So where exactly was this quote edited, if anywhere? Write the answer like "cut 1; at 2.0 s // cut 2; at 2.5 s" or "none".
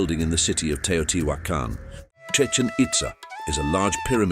cut 1; at 1.9 s